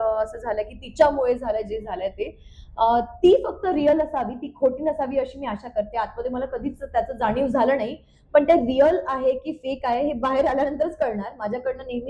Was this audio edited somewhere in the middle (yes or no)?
no